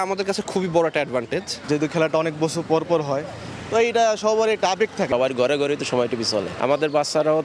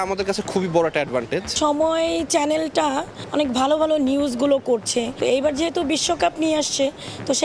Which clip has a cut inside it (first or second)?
second